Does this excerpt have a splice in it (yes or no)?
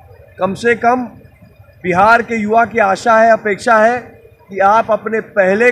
no